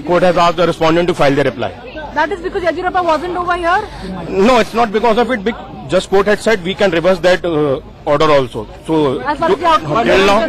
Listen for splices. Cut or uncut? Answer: uncut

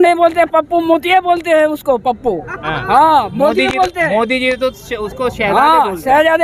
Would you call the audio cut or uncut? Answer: uncut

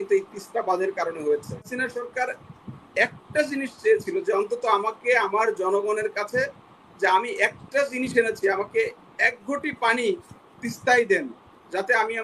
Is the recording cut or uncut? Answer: cut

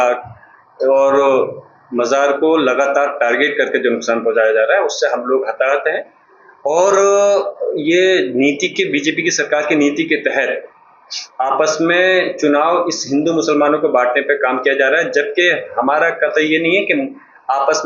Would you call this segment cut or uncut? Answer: uncut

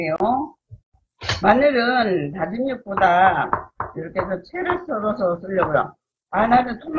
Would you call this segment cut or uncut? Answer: uncut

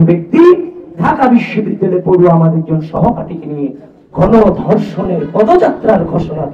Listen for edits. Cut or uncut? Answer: uncut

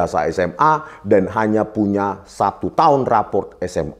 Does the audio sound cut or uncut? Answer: uncut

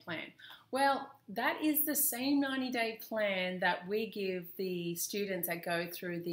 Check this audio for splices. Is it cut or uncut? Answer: uncut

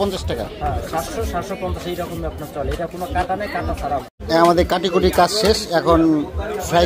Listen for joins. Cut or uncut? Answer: cut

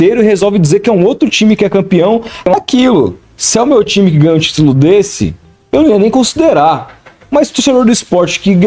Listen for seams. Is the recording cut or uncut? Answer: cut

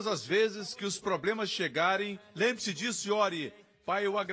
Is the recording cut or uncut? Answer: cut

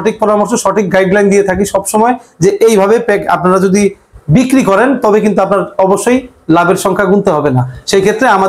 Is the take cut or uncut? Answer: uncut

